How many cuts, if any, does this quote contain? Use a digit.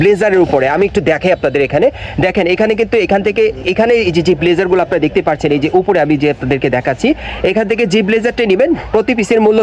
0